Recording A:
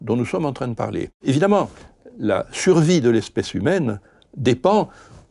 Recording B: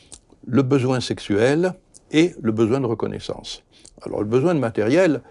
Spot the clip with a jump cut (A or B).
A